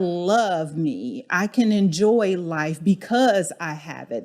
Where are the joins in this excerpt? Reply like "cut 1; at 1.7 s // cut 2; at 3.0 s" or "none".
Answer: cut 1; at 1.5 s